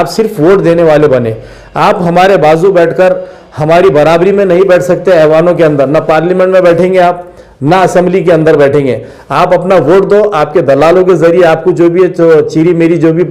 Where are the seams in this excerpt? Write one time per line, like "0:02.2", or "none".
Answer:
none